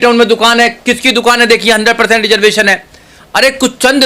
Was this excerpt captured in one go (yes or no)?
yes